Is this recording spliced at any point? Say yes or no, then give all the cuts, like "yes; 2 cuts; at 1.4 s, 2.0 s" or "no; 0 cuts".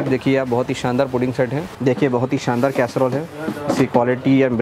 yes; 1 cut; at 1.7 s